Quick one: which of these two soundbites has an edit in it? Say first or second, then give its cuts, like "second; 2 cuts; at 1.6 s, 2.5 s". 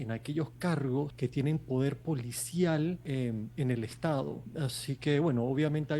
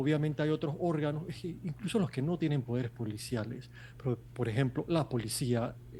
first; 3 cuts; at 1.1 s, 3.0 s, 4.4 s